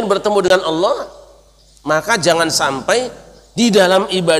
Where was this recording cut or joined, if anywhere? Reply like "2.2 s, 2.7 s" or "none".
none

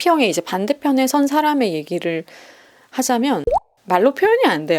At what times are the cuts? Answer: 3.8 s

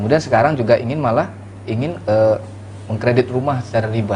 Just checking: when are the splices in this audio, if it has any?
none

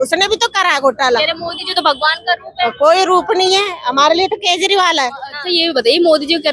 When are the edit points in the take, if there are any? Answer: 5.3 s

